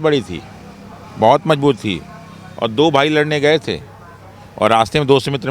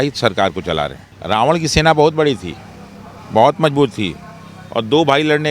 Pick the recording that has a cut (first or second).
second